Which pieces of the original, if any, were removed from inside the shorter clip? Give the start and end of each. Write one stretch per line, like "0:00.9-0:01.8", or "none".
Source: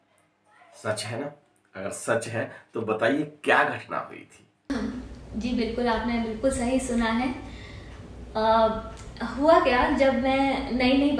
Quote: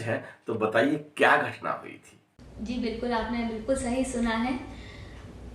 0:04.5-0:05.0